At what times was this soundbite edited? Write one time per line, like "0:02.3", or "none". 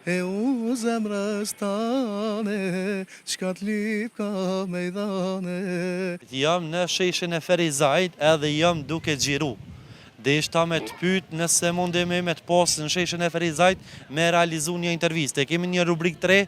0:06.3

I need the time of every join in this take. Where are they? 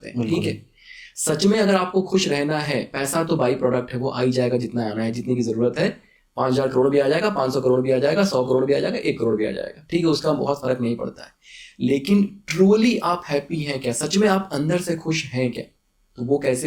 none

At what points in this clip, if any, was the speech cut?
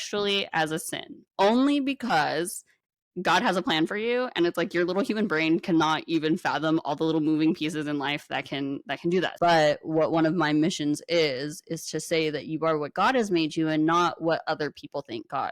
0:09.3

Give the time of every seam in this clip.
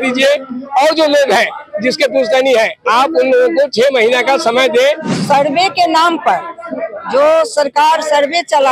0:05.1

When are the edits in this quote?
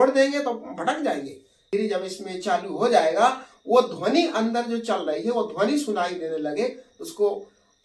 0:01.7

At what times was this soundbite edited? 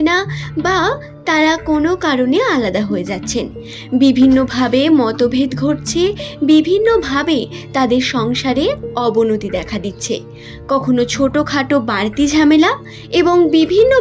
none

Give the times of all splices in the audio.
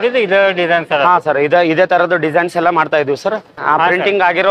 0:03.6

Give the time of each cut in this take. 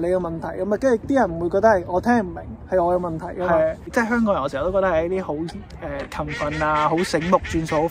0:03.8

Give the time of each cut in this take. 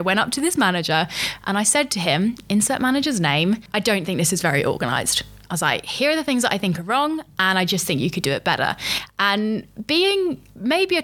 none

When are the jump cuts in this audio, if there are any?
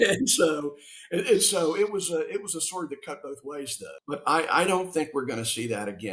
0:03.9

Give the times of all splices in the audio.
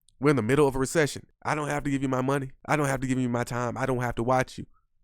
0:01.3

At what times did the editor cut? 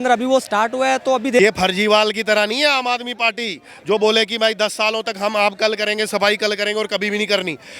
0:01.4

